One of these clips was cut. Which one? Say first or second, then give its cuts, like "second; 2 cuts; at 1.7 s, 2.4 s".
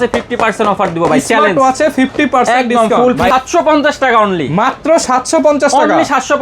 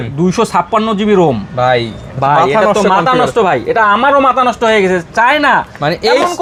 first; 1 cut; at 3.3 s